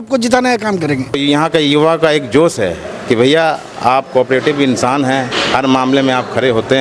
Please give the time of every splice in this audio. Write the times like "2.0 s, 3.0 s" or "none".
1.2 s